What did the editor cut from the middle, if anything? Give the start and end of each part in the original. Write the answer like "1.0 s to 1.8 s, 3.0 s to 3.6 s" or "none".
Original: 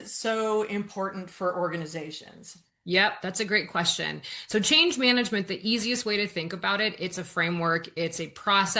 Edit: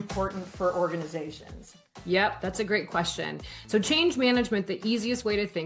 none